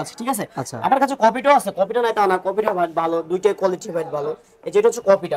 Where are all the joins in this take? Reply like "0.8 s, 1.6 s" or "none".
none

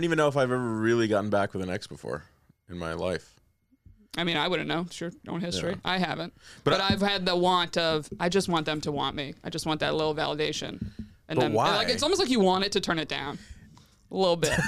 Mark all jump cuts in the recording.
none

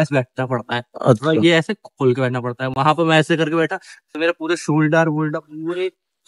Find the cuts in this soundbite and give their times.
none

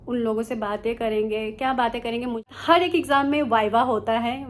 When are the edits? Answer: 2.5 s

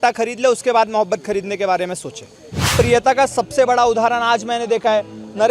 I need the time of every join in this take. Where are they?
2.6 s

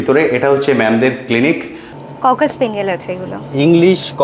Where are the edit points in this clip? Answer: 1.9 s

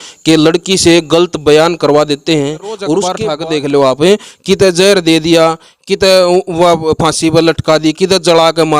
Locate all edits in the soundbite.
3.2 s

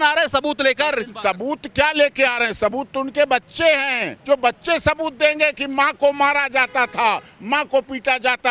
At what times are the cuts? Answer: none

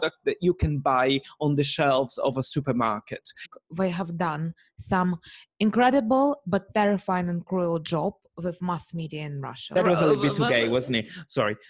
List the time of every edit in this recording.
3.4 s, 9.7 s

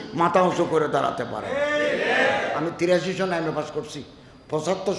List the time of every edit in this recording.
2.5 s

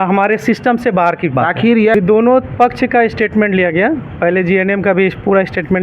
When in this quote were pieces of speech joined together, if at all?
1.9 s

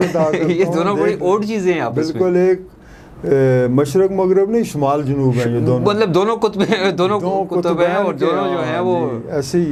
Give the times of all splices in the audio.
none

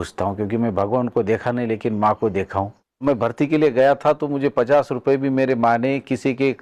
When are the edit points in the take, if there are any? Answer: 3.0 s

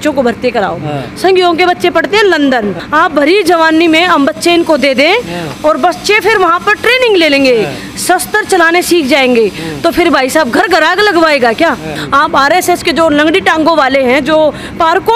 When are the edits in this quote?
2.8 s, 12.0 s

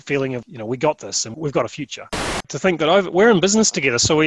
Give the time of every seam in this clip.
2.5 s

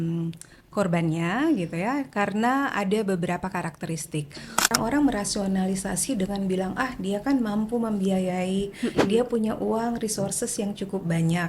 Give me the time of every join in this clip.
4.7 s

